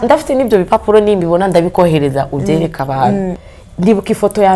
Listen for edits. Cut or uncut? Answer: cut